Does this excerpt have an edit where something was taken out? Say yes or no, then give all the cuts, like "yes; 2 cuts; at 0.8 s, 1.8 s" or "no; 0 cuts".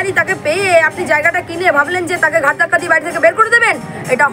no; 0 cuts